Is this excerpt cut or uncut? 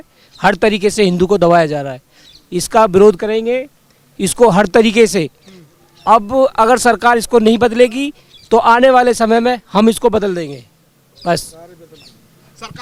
uncut